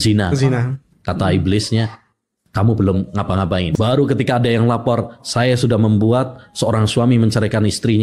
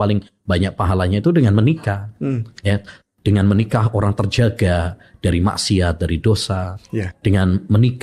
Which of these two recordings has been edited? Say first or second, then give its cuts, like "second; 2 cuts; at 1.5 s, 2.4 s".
first; 1 cut; at 3.7 s